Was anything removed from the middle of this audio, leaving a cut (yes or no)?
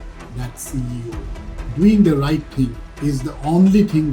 yes